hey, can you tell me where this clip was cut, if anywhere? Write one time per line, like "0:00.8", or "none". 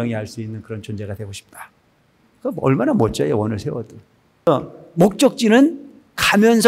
0:04.5